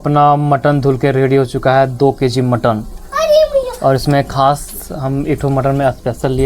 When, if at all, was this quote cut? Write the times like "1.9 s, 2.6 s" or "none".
none